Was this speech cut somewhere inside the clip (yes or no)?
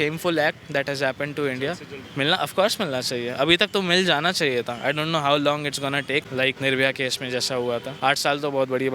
yes